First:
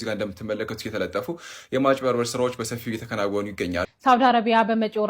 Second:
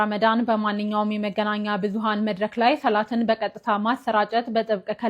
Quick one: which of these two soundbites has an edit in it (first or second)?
first